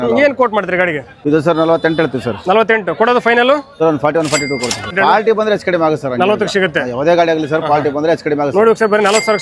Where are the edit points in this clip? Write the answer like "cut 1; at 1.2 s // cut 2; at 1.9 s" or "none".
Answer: cut 1; at 1.1 s // cut 2; at 3.7 s // cut 3; at 4.9 s